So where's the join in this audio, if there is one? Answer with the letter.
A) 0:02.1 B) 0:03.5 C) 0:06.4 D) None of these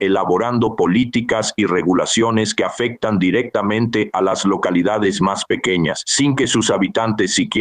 D